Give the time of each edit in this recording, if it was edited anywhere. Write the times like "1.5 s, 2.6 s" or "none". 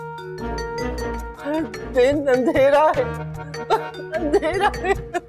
1.3 s